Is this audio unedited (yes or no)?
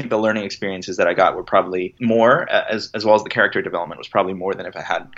no